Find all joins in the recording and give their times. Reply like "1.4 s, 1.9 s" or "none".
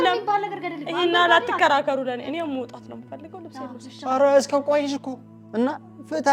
5.1 s